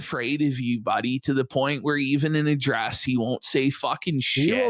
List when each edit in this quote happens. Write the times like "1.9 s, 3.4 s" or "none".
none